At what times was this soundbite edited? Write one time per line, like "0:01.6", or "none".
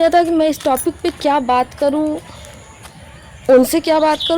none